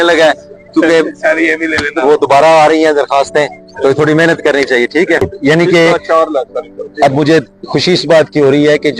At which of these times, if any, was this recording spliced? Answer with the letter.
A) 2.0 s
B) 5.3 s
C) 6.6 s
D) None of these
B